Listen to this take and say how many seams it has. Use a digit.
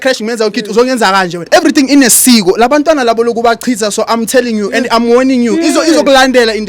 1